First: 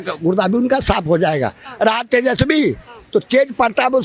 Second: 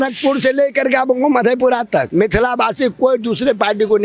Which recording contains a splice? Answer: second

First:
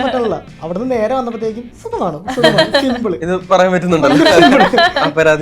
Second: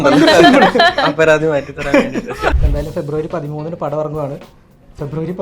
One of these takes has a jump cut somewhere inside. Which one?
second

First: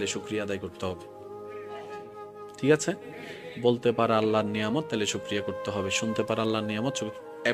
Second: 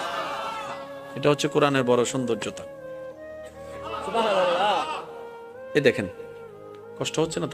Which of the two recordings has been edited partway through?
second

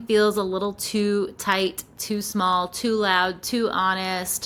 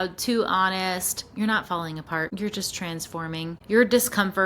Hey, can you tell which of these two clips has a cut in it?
second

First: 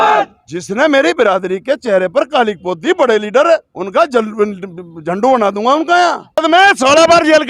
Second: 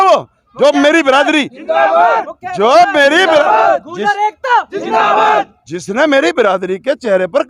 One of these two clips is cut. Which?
first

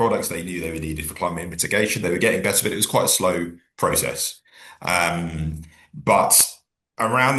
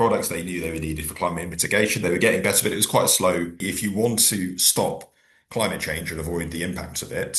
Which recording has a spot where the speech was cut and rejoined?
second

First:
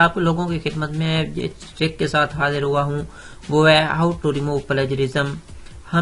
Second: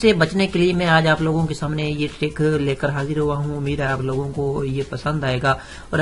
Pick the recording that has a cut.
second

